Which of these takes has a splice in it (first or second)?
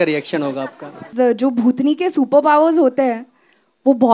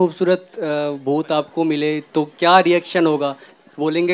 first